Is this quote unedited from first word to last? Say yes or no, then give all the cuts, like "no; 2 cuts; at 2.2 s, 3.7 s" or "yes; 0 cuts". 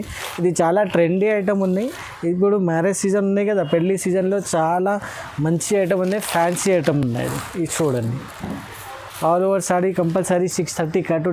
yes; 0 cuts